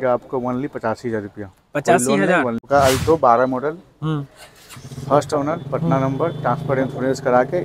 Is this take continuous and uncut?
no; 1 cut; at 2.7 s

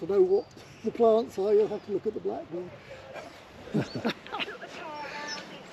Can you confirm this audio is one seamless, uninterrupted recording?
yes; 0 cuts

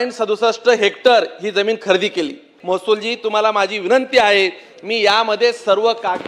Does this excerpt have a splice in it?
yes; 1 cut; at 2.5 s

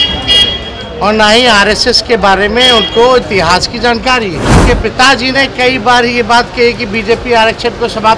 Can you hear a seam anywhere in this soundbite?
yes; 1 cut; at 4.5 s

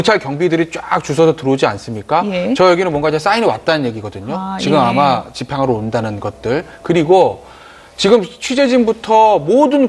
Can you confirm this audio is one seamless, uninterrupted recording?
yes; 0 cuts

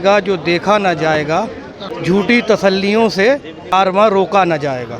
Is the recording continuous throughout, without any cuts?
no; 2 cuts; at 1.9 s, 3.7 s

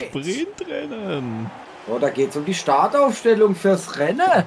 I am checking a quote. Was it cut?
yes; 1 cut; at 1.6 s

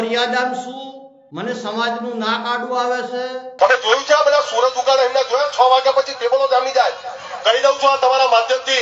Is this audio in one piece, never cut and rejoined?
no; 1 cut; at 3.5 s

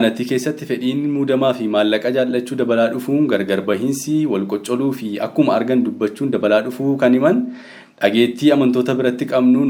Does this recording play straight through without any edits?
yes; 0 cuts

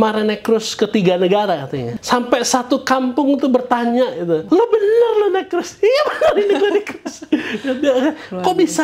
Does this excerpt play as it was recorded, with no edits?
no; 2 cuts; at 1.9 s, 4.4 s

